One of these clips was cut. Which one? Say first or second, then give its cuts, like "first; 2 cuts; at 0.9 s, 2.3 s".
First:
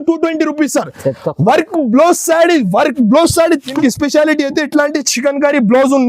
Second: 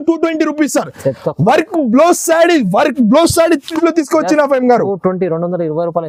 first; 1 cut; at 3.7 s